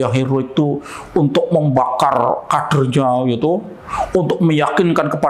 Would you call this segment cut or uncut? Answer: uncut